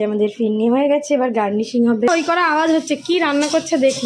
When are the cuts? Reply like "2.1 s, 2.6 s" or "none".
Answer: 2.1 s